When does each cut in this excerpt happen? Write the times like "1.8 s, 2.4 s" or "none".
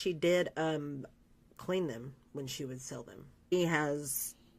3.5 s